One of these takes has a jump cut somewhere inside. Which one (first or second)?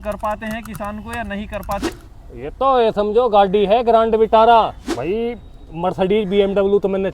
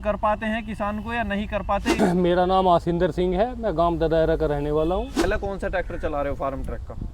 first